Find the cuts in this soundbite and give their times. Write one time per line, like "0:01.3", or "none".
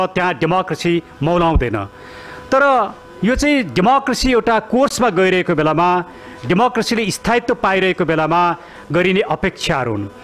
none